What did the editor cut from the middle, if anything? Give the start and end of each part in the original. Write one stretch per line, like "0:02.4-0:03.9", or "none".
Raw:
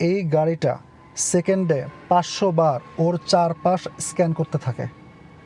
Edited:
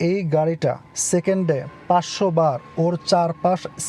0:00.9-0:01.1